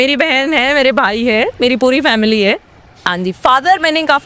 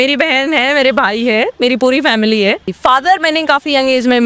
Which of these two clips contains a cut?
second; 1 cut; at 2.7 s

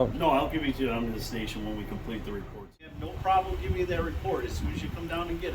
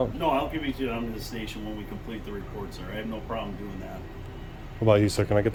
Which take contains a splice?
first; 1 cut; at 2.9 s

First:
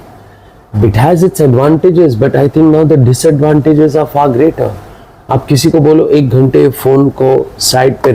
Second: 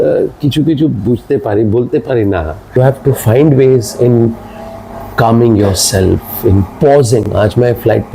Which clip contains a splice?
second; 1 cut; at 2.8 s

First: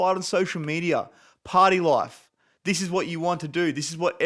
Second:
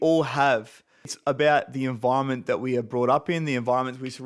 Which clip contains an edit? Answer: second; 1 cut; at 1.1 s

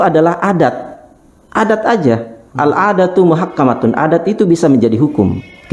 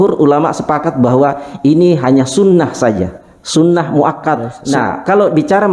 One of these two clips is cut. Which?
second; 1 cut; at 4.5 s

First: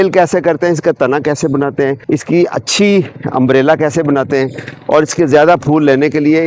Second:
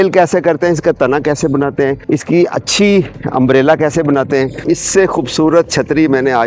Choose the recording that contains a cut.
second; 1 cut; at 4.6 s

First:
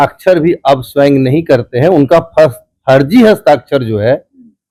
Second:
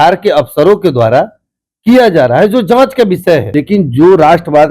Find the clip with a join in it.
second; 1 cut; at 3.5 s

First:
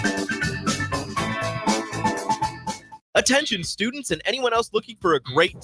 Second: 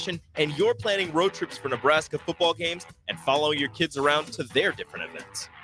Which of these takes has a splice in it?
first; 1 cut; at 3.0 s

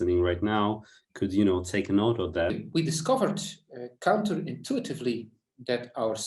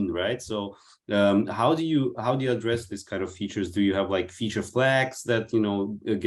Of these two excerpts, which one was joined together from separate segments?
first; 1 cut; at 2.6 s

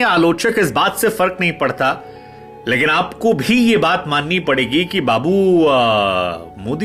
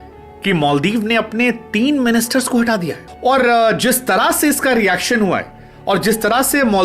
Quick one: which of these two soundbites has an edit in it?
second; 1 cut; at 3.0 s

